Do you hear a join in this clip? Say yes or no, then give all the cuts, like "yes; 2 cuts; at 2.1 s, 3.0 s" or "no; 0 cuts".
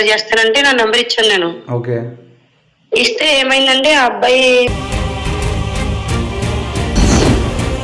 no; 0 cuts